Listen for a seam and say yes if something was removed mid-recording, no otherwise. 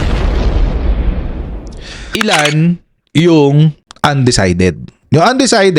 yes